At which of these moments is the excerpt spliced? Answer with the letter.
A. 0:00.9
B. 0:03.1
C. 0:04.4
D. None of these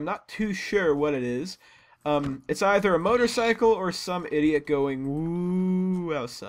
D